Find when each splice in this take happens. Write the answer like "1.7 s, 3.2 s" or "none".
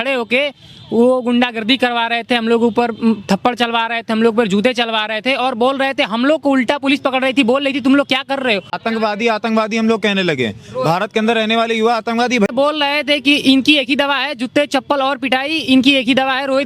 8.8 s, 12.5 s